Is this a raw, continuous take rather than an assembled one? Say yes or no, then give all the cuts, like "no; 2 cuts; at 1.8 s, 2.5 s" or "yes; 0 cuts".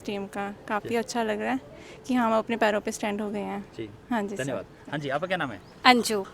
yes; 0 cuts